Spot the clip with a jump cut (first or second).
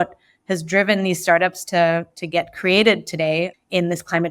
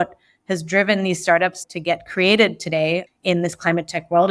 second